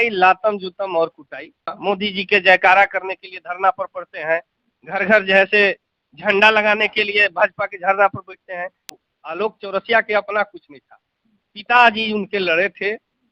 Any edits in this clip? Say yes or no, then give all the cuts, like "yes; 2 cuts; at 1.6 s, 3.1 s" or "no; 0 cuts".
yes; 2 cuts; at 1.8 s, 9.0 s